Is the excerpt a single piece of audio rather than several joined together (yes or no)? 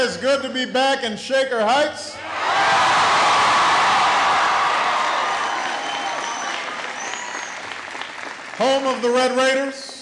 yes